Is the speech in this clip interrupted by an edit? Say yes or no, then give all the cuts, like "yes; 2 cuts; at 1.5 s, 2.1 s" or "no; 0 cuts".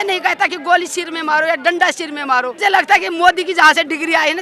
yes; 1 cut; at 2.5 s